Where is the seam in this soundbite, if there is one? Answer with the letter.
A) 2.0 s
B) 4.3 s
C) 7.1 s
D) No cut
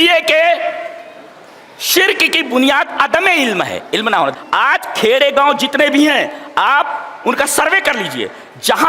B